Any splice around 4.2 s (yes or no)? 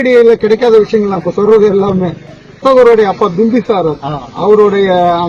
no